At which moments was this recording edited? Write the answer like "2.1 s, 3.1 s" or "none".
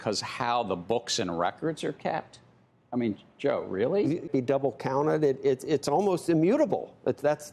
4.3 s